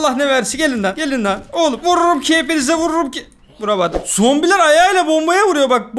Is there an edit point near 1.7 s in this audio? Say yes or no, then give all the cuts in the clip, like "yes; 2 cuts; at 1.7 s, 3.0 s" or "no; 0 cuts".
no; 1 cut; at 4.0 s